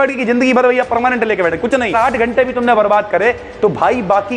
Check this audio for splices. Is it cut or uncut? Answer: cut